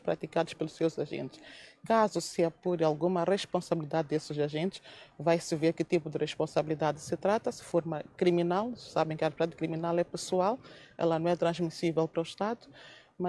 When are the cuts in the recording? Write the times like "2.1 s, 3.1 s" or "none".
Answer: none